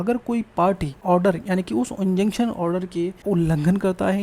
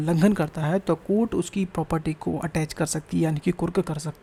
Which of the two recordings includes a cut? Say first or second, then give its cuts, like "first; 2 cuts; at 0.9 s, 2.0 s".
first; 2 cuts; at 0.9 s, 3.2 s